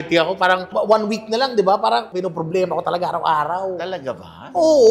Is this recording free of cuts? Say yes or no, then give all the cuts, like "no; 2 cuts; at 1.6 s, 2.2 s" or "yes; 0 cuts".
no; 1 cut; at 2.1 s